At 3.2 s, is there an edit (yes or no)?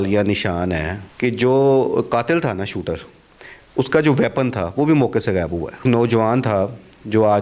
no